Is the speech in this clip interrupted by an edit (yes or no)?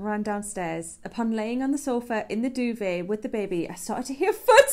no